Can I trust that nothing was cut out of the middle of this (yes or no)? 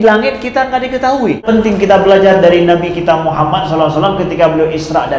no